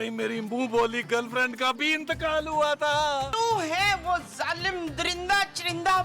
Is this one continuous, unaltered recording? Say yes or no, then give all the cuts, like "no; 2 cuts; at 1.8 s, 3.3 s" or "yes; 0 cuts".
no; 1 cut; at 3.3 s